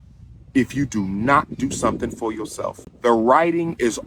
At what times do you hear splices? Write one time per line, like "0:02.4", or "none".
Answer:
0:02.9

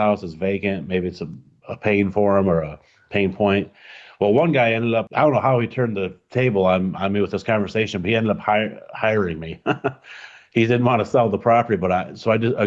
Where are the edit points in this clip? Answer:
0:05.1

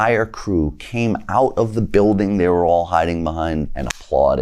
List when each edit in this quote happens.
none

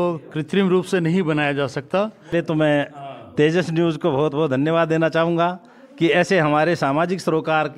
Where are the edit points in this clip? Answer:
0:02.3

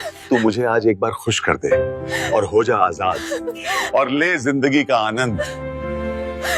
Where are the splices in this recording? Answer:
none

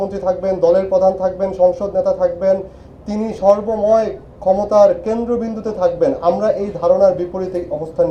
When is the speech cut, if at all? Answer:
none

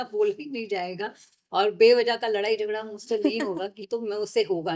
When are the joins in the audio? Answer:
0:03.8

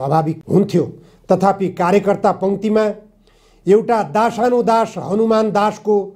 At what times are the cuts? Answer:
none

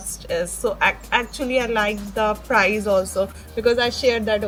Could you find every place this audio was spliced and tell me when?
none

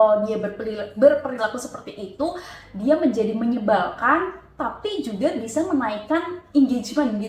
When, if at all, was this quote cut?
none

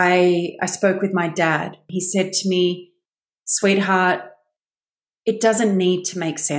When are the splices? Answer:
0:01.9

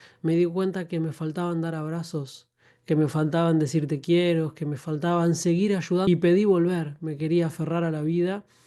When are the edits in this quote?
0:06.1

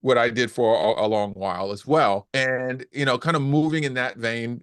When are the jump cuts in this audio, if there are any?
0:02.3

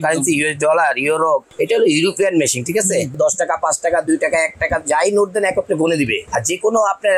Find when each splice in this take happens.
0:01.5
0:03.2
0:06.2

